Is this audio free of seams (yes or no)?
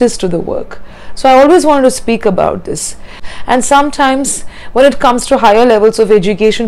no